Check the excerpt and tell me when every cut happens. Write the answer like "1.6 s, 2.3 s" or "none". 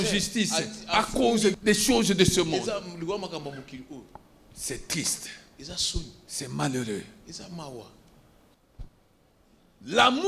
8.5 s